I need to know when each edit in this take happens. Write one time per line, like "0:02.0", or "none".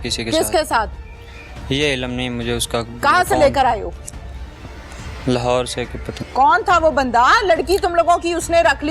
0:06.1